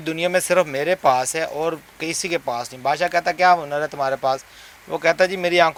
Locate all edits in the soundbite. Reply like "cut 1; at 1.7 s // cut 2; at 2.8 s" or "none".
none